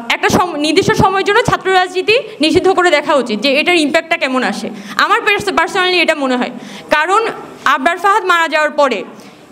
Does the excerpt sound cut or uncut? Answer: uncut